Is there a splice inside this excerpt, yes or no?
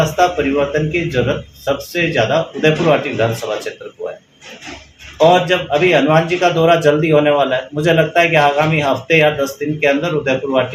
no